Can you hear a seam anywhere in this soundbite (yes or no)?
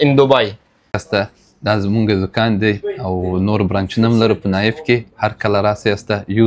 yes